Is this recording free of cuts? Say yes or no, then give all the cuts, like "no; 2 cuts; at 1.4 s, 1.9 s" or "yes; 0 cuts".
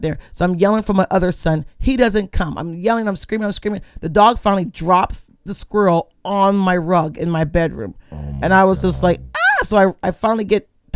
yes; 0 cuts